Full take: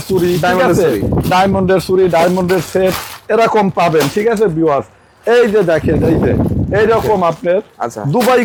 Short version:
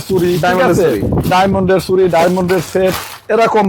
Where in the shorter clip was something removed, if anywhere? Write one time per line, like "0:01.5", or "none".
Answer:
none